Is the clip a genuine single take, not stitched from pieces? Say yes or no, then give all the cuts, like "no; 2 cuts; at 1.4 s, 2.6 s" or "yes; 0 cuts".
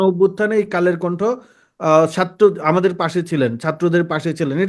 yes; 0 cuts